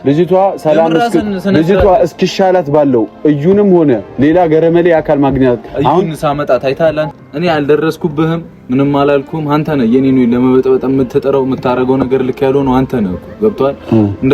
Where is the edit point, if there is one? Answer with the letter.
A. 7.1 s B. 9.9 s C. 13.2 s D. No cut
A